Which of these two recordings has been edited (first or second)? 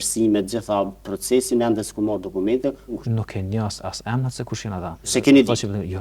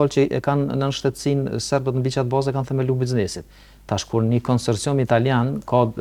first